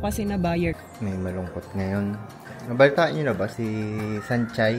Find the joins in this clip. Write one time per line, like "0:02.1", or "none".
0:00.8
0:03.5